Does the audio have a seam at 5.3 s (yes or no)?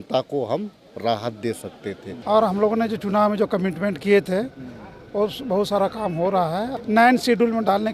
no